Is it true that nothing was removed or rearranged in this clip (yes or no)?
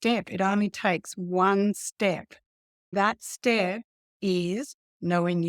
no